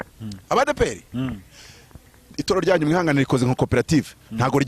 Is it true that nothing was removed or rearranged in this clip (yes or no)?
no